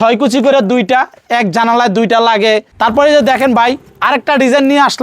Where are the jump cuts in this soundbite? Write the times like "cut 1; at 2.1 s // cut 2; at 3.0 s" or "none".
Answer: cut 1; at 2.7 s